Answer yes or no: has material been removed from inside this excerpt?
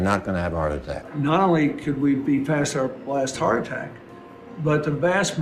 yes